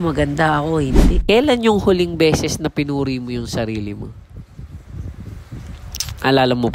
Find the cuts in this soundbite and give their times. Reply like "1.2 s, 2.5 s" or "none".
1.1 s